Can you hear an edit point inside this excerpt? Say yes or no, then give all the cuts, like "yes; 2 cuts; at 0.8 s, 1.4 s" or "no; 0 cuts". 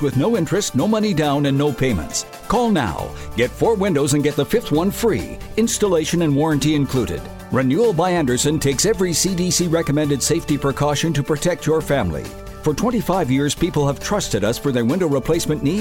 no; 0 cuts